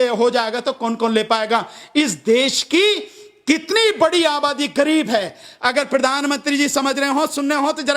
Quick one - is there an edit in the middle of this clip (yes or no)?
no